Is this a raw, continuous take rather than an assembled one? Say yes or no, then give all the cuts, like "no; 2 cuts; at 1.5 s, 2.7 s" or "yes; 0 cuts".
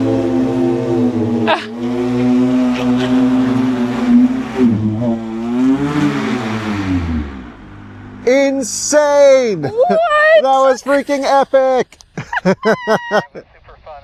yes; 0 cuts